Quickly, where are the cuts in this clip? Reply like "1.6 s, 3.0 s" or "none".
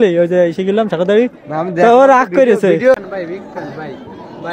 3.0 s